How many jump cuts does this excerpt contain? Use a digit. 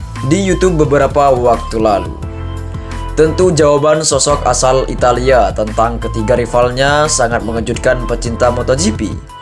0